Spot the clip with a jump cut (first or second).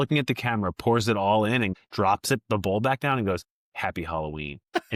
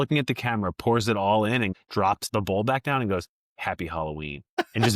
second